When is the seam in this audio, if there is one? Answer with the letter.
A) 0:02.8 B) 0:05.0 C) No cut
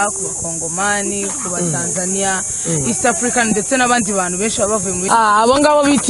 B